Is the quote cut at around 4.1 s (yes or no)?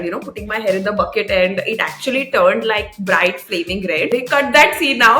yes